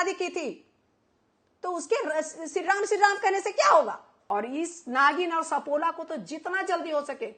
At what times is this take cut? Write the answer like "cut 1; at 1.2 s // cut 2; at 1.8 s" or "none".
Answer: cut 1; at 4.1 s